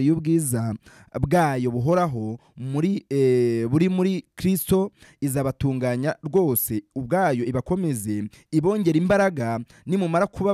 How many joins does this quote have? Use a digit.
0